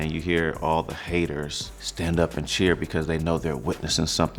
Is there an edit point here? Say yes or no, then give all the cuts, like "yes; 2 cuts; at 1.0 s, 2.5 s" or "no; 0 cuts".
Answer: no; 0 cuts